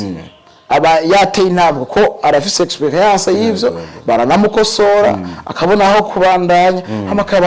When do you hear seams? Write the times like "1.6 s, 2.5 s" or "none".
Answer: none